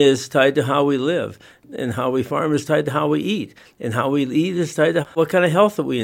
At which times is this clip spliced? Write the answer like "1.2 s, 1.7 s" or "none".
5.1 s

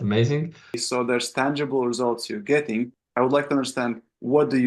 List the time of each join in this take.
0.8 s, 3.0 s

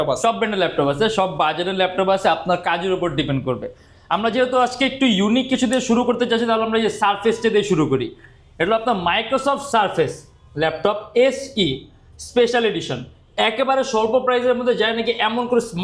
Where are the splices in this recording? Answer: none

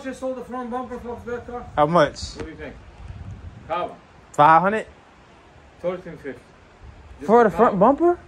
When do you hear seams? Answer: none

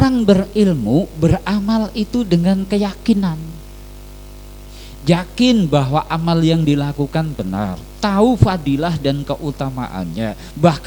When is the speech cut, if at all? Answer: none

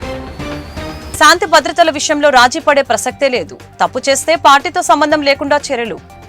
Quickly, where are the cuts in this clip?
1.1 s

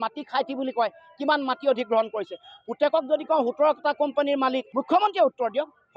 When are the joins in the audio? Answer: 4.7 s

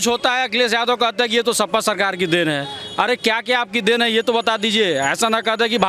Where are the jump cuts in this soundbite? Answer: none

